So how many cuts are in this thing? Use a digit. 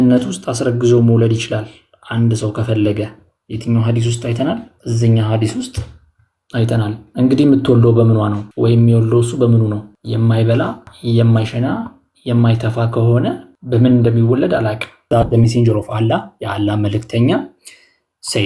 6